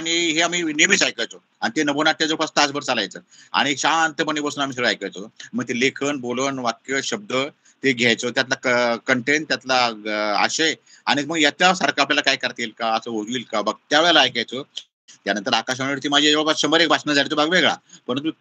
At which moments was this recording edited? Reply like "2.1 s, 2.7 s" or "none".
none